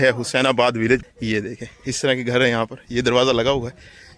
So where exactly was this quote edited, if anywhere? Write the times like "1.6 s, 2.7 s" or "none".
none